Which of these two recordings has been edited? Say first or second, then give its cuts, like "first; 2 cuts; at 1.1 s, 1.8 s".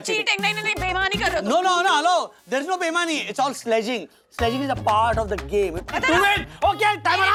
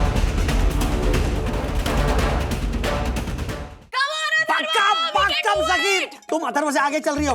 second; 2 cuts; at 1.7 s, 3.5 s